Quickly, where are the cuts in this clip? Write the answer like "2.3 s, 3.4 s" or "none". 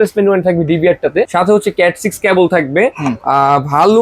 1.3 s